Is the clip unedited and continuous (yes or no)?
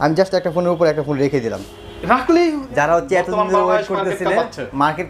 no